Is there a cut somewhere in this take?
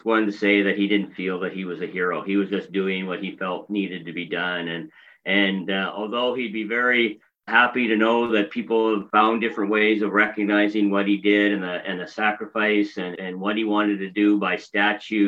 yes; 3 cuts; at 7.5 s, 9.1 s, 13.1 s

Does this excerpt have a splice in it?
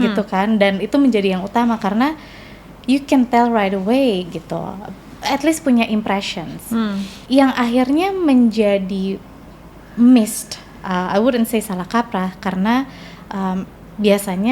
no; 0 cuts

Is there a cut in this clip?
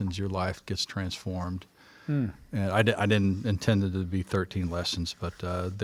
no; 0 cuts

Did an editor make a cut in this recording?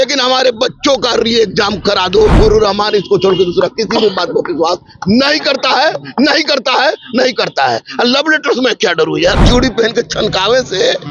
yes; 2 cuts; at 2.3 s, 9.4 s

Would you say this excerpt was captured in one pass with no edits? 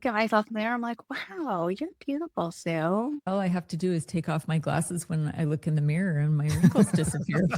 no; 1 cut; at 3.3 s

